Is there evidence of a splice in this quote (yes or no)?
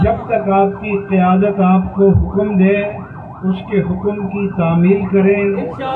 no